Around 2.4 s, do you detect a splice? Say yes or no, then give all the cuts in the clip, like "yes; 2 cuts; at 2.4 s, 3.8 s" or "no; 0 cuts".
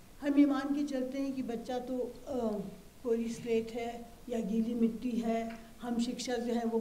no; 0 cuts